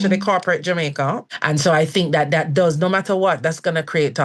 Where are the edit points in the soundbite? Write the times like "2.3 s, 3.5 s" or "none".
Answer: 1.3 s